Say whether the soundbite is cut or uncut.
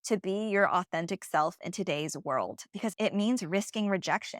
cut